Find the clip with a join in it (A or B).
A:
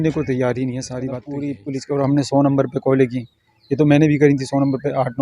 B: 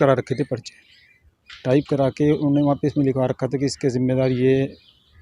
A